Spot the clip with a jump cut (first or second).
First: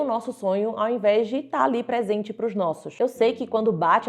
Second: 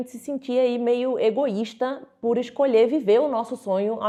first